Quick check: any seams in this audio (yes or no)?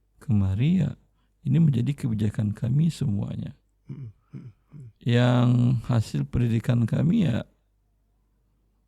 no